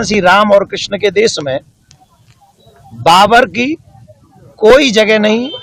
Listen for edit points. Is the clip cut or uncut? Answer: uncut